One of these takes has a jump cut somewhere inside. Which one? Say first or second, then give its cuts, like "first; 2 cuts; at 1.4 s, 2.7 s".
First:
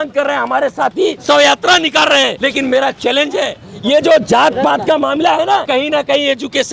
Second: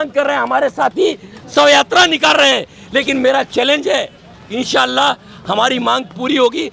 first; 4 cuts; at 1.2 s, 2.3 s, 3.7 s, 5.7 s